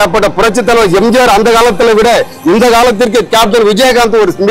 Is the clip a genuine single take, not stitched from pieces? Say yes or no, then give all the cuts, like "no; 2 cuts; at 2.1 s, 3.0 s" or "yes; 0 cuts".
yes; 0 cuts